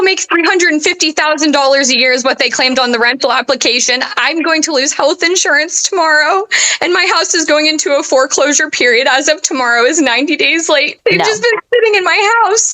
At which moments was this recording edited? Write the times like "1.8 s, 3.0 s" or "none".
10.9 s